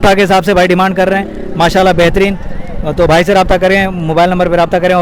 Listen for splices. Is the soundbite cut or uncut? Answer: uncut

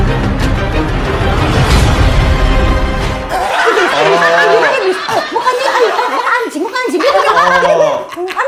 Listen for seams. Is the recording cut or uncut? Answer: uncut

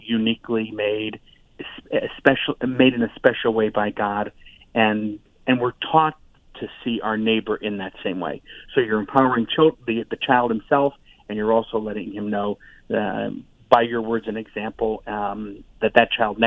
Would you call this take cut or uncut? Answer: uncut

